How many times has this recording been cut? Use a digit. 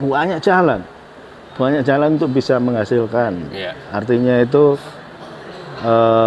0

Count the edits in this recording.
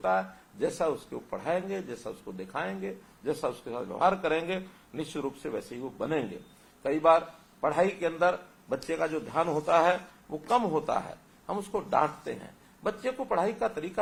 0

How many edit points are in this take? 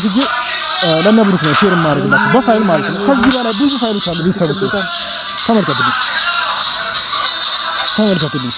0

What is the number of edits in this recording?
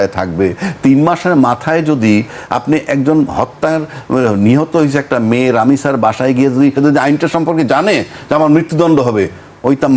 1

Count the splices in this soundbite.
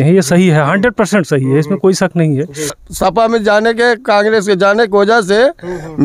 1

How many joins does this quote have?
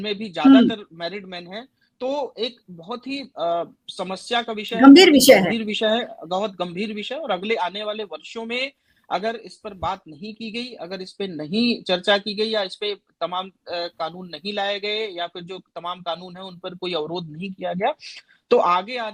0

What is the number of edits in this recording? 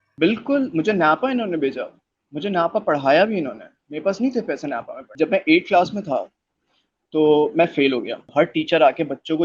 2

